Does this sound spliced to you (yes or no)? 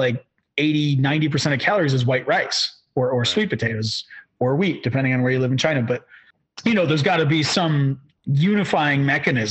no